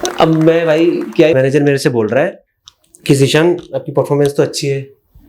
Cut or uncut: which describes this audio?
cut